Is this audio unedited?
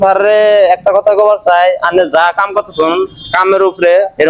yes; 0 cuts

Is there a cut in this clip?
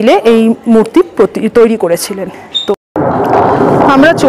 yes; 1 cut; at 2.7 s

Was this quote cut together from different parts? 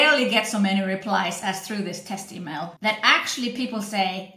yes; 1 cut; at 2.7 s

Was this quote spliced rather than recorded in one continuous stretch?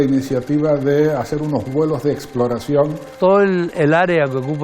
yes; 1 cut; at 3.1 s

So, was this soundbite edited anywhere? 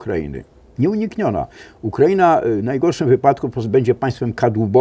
no; 0 cuts

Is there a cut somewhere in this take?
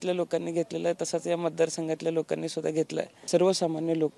yes; 1 cut; at 3.2 s

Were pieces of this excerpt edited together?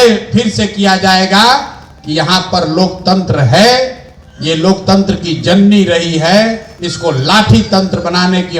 no; 0 cuts

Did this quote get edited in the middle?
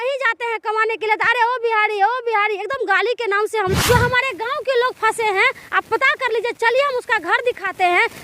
yes; 1 cut; at 3.7 s

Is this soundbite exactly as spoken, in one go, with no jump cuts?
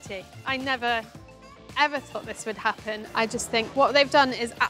no; 1 cut; at 3.0 s

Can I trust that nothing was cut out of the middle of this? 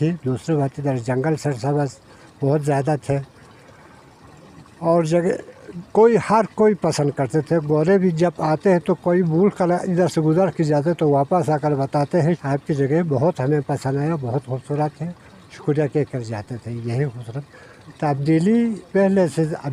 no; 1 cut; at 12.4 s

